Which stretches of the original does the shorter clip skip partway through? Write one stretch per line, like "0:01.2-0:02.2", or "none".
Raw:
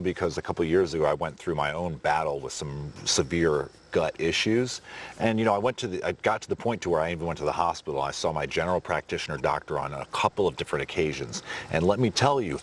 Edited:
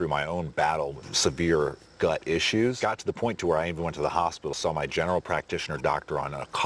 0:02.5-0:03.0
0:04.7-0:06.2
0:07.9-0:08.1